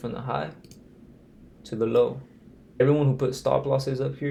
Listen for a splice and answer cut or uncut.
uncut